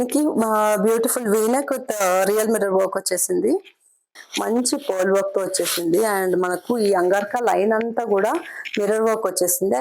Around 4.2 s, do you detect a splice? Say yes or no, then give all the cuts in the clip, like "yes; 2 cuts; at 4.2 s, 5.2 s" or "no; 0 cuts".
yes; 1 cut; at 4.2 s